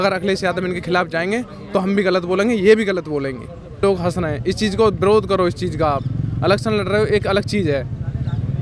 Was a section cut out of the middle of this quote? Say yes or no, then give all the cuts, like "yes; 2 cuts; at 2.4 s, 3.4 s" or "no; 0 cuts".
yes; 1 cut; at 3.8 s